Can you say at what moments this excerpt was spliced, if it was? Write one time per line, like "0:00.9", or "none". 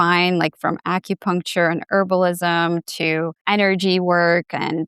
0:03.4